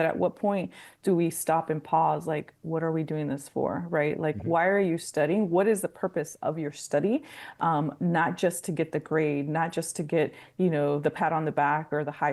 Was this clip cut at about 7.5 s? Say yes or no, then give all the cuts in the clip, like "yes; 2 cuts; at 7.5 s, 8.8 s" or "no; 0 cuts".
no; 0 cuts